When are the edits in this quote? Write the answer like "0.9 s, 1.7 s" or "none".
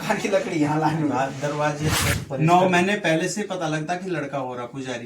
2.0 s